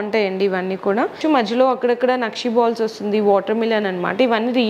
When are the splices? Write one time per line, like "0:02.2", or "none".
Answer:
0:01.2

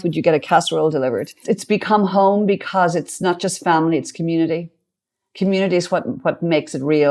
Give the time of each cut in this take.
0:01.4

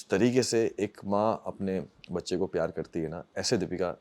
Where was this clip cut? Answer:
none

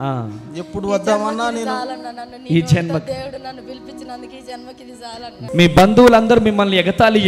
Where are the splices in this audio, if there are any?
0:05.5

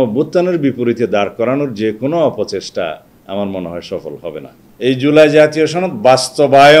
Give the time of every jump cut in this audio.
0:04.5

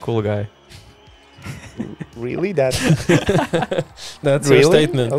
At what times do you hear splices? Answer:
none

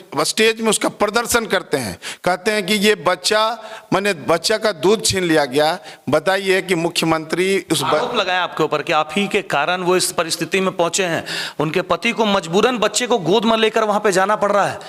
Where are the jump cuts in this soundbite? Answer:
none

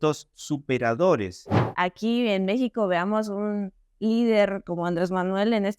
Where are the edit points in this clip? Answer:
0:01.6

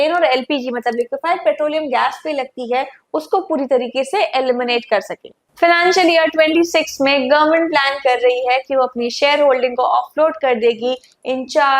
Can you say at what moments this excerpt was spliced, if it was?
0:05.3

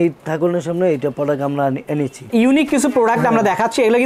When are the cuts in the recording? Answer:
0:02.3

